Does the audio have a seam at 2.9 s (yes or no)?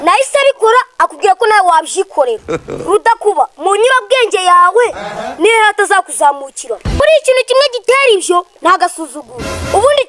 no